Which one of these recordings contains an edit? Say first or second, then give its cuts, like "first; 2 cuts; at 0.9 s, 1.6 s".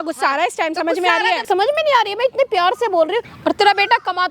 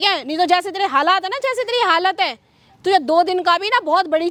first; 2 cuts; at 1.5 s, 3.3 s